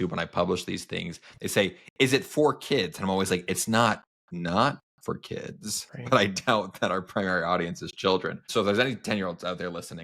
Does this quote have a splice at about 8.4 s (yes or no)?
yes